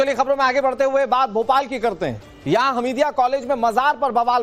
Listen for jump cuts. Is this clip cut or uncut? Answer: cut